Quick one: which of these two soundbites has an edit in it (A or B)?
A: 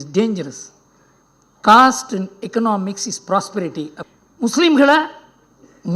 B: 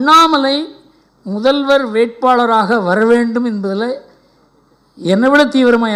A